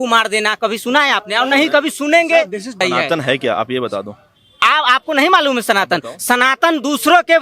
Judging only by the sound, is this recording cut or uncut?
cut